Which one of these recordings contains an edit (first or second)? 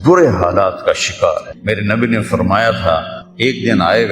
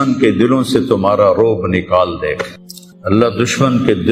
first